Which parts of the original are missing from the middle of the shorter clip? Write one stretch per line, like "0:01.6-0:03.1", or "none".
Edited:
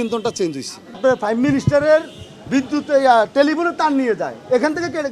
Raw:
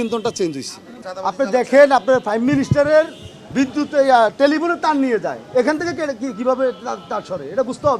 0:01.0-0:02.0